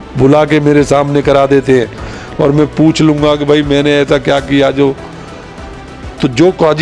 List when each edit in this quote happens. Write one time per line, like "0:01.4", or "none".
none

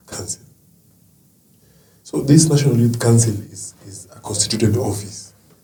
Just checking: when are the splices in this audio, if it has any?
none

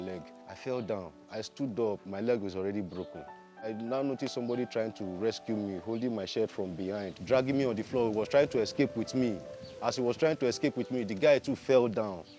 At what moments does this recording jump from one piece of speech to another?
0:03.6
0:07.2

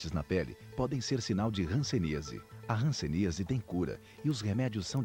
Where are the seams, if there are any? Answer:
none

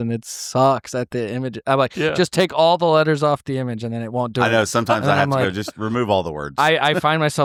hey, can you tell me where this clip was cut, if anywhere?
none

